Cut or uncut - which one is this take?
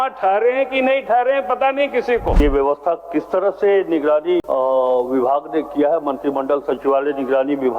cut